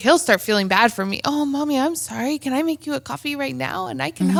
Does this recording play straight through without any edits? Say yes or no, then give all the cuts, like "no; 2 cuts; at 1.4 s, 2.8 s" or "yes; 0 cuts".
yes; 0 cuts